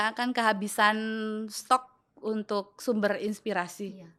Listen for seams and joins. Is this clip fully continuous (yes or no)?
yes